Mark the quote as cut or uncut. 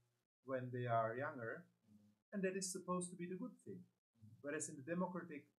uncut